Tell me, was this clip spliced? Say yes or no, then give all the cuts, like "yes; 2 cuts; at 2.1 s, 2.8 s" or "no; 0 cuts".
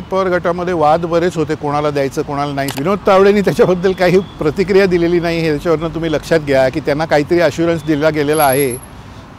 yes; 1 cut; at 2.7 s